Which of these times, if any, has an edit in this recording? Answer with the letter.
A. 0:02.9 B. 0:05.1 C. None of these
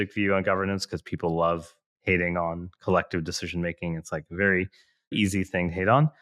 B